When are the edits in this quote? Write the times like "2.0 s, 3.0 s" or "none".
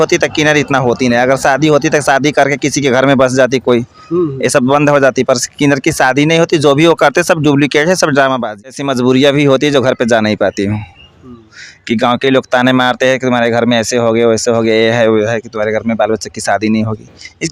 8.6 s